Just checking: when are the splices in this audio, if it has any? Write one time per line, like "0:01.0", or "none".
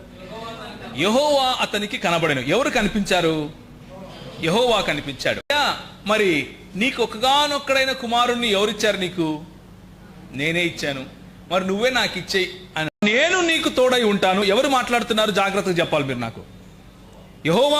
0:05.5
0:13.0